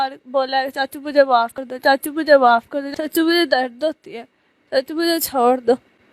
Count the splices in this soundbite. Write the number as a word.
two